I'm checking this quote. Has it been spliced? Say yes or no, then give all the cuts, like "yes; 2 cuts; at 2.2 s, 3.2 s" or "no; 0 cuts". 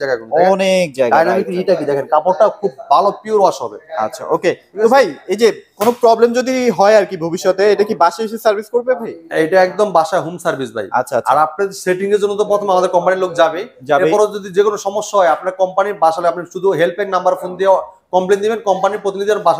no; 0 cuts